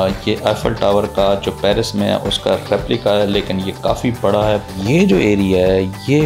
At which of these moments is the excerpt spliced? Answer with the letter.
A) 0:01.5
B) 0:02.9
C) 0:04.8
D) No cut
C